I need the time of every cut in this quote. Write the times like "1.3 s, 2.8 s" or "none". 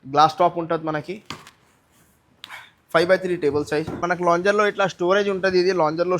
4.0 s